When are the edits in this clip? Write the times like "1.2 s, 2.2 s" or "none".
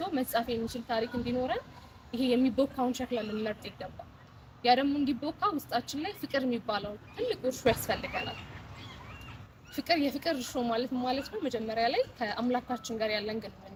none